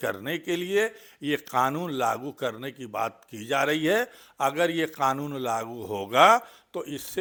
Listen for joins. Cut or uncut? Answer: uncut